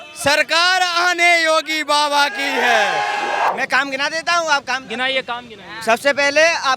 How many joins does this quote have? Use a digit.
1